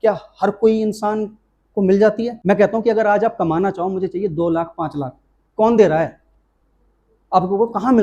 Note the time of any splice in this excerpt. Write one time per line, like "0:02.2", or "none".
0:02.4

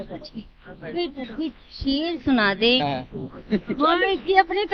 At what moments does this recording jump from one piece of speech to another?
0:02.8

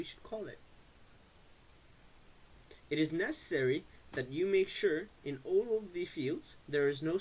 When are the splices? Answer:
0:04.0

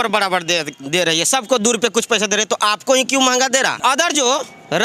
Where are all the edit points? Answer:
0:03.8

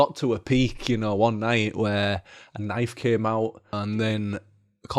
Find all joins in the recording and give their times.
0:03.7

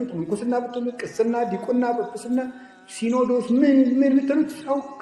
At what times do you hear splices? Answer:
none

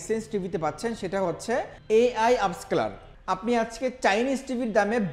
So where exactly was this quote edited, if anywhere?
0:01.8
0:03.0

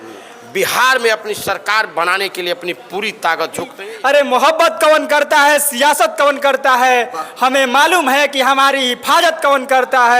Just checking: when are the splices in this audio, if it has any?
0:03.7

